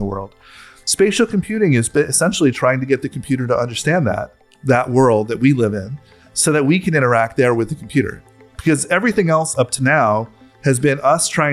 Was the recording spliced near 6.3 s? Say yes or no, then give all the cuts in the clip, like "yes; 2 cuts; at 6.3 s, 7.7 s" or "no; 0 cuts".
no; 0 cuts